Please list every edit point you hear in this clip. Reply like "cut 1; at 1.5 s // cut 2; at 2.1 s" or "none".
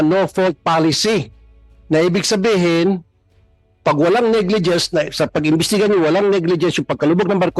none